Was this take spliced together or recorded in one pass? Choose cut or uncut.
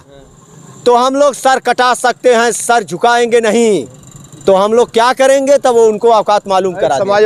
uncut